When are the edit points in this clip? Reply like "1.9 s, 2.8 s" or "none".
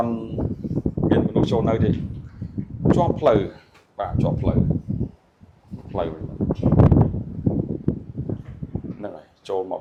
none